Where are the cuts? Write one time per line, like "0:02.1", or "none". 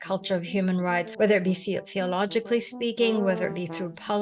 0:01.1